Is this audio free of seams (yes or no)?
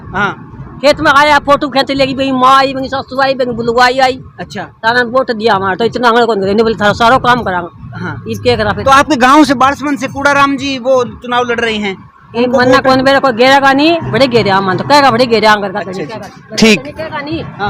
yes